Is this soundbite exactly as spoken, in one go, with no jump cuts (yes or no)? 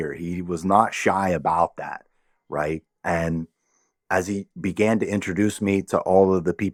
yes